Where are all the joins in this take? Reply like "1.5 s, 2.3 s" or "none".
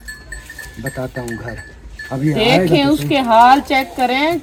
none